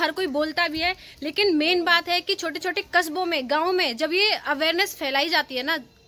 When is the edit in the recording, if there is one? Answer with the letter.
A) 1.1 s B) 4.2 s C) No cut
C